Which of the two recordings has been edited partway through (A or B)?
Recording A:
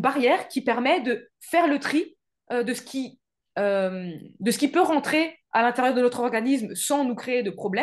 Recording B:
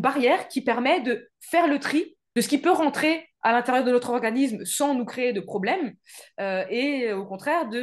B